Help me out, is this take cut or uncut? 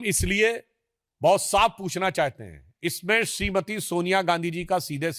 uncut